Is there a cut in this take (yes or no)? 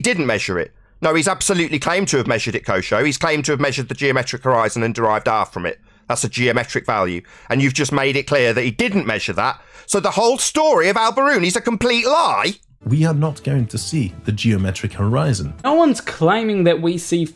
yes